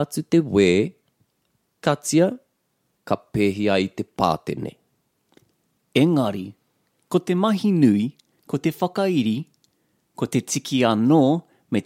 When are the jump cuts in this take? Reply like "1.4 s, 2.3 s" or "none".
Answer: none